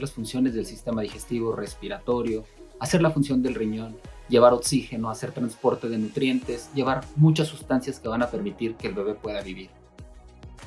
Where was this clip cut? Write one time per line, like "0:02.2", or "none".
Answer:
none